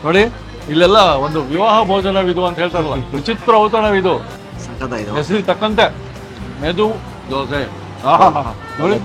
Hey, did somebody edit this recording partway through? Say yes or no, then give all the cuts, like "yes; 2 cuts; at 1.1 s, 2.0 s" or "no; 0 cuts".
yes; 1 cut; at 4.3 s